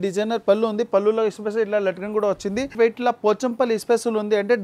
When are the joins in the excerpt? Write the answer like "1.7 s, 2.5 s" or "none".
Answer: 2.7 s